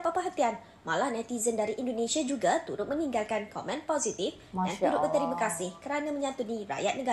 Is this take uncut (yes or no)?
yes